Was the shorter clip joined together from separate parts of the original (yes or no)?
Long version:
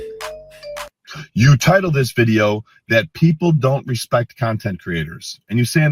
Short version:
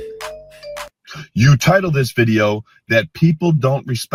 no